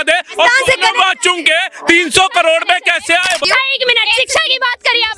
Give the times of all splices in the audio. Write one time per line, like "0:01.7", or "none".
0:03.4